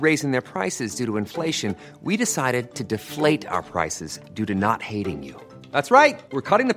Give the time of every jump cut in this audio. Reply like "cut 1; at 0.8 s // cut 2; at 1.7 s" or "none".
none